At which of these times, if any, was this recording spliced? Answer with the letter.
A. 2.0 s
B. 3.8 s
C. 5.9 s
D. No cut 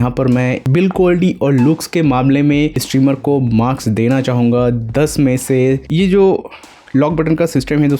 C